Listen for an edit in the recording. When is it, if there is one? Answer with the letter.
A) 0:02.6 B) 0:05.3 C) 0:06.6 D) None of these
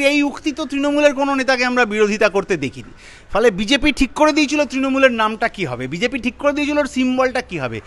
D